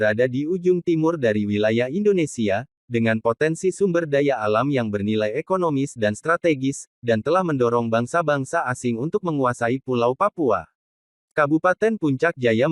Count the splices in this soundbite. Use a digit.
1